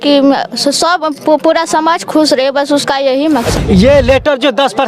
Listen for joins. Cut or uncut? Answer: cut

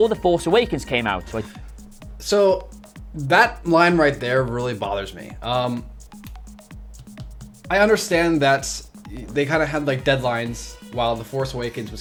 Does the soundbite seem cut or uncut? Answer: uncut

